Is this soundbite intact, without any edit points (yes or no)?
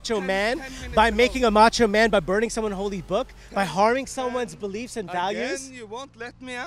yes